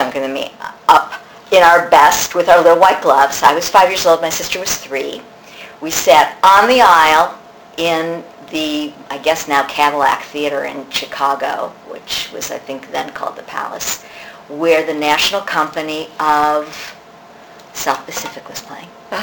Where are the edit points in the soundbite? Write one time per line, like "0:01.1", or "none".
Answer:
none